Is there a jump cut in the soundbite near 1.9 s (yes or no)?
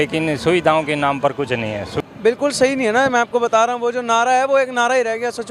yes